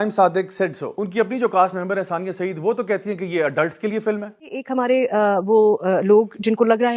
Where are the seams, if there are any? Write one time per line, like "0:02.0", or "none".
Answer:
0:01.0